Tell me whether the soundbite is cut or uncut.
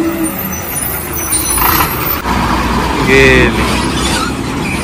cut